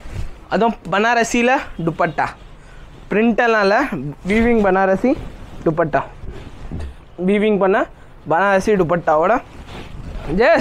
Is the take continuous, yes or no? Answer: yes